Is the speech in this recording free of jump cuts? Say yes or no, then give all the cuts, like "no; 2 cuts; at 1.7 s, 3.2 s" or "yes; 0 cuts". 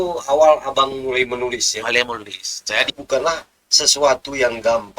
no; 1 cut; at 3.0 s